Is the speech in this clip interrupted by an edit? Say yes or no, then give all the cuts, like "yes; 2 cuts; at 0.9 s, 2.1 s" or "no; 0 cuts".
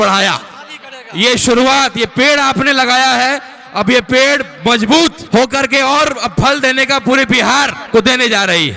yes; 2 cuts; at 5.2 s, 7.8 s